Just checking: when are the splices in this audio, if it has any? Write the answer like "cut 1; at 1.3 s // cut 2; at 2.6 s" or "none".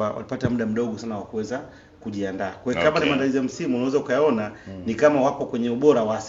none